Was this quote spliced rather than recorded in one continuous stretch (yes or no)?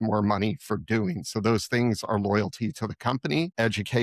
no